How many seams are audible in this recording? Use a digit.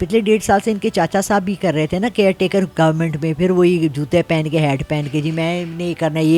0